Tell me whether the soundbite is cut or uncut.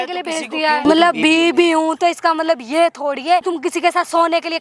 cut